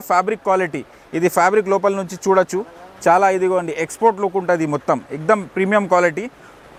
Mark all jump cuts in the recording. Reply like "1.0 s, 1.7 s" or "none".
none